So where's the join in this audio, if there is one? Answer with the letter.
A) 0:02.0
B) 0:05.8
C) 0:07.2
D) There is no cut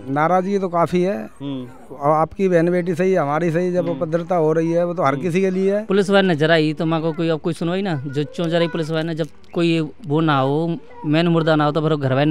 B